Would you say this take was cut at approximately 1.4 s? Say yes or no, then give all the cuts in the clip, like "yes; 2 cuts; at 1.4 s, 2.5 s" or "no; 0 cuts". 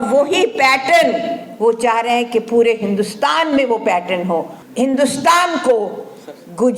no; 1 cut; at 4.6 s